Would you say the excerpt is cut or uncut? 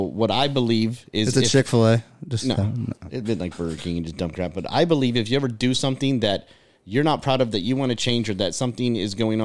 uncut